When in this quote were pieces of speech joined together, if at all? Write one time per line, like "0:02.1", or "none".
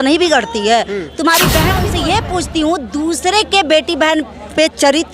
0:01.8